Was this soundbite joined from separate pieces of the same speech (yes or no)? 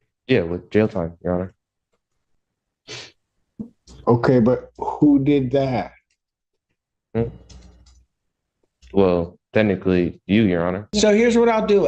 yes